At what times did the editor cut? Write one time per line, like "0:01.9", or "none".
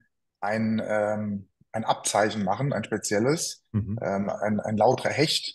none